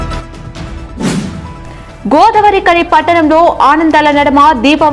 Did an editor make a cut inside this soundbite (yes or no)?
no